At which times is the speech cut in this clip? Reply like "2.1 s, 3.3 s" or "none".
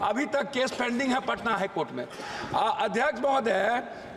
none